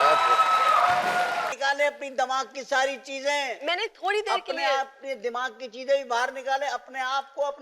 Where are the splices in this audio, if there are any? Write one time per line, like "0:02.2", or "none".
0:01.5